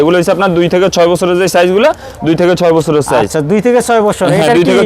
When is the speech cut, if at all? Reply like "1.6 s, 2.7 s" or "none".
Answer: none